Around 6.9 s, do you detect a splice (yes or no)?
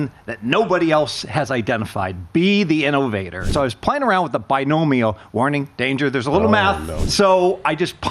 yes